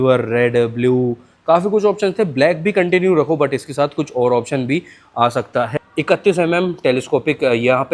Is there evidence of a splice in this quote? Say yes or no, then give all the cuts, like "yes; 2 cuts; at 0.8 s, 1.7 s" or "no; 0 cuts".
yes; 1 cut; at 5.7 s